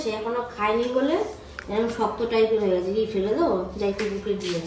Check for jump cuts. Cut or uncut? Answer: uncut